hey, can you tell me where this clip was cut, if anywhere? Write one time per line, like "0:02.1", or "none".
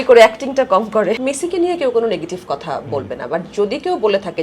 0:01.1